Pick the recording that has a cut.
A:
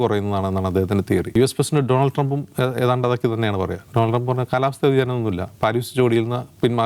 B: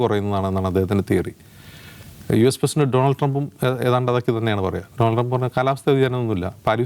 A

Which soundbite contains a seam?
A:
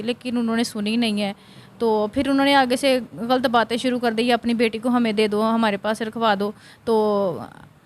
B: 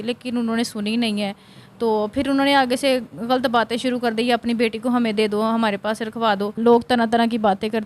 B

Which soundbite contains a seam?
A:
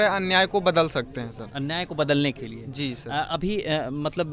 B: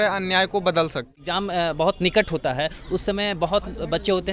B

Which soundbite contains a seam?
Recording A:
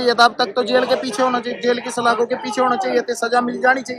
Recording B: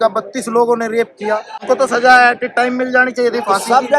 B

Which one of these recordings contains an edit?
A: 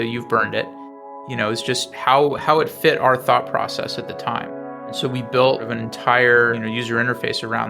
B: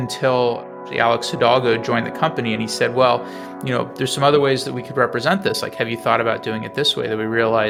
A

